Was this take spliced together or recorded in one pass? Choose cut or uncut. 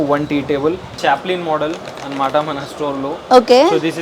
cut